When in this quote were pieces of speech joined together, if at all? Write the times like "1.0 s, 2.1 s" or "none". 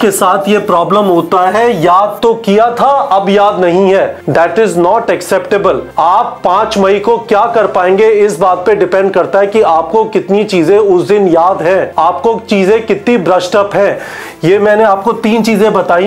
4.2 s, 5.9 s, 11.9 s